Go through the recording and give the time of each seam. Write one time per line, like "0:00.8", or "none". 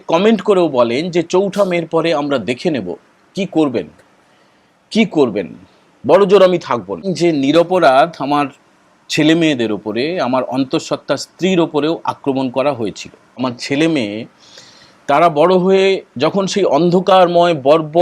0:07.0
0:13.4